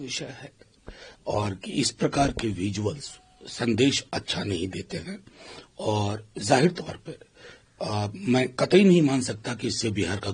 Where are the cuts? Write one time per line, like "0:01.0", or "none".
none